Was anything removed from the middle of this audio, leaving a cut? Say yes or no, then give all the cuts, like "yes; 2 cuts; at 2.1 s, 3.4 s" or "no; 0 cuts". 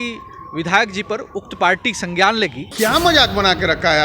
yes; 1 cut; at 2.7 s